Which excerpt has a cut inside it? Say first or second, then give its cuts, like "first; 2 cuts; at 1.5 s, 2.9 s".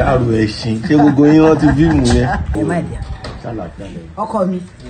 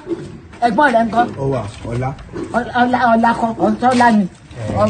first; 1 cut; at 2.5 s